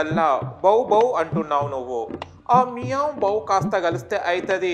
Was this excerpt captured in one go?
yes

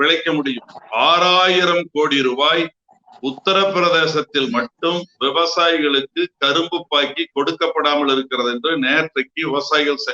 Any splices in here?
no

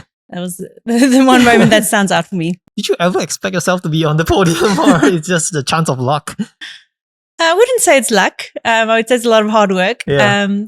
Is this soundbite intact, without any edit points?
no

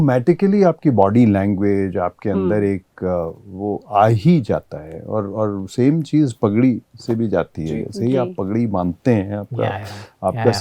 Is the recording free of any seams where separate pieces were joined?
yes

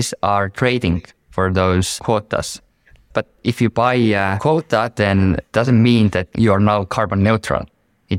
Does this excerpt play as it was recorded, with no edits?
no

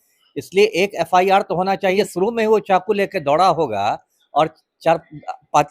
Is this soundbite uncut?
no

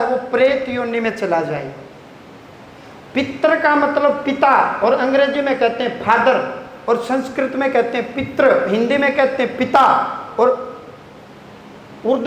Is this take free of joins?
yes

